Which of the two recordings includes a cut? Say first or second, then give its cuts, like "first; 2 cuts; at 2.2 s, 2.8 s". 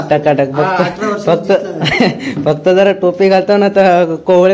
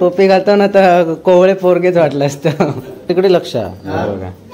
second; 1 cut; at 3.1 s